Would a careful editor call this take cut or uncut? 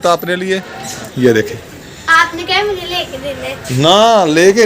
cut